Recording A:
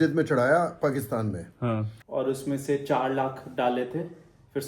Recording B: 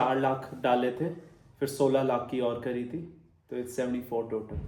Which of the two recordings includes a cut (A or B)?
A